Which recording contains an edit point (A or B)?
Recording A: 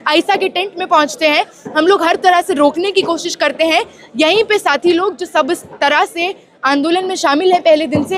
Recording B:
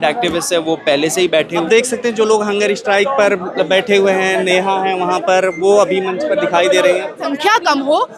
B